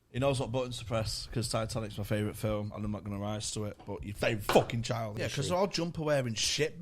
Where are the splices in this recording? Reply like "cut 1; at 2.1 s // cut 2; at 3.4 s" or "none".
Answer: cut 1; at 5.1 s